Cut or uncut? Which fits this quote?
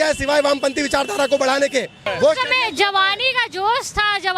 cut